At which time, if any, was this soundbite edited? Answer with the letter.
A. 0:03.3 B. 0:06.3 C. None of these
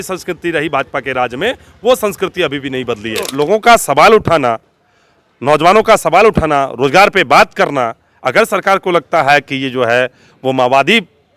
A